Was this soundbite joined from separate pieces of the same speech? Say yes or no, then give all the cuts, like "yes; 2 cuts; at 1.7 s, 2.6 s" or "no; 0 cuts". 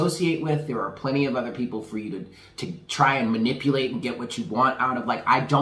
no; 0 cuts